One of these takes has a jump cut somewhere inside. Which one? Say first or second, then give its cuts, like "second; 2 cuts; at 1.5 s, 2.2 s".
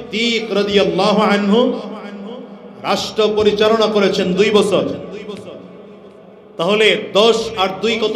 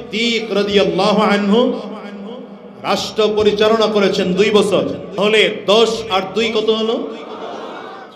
second; 1 cut; at 5.1 s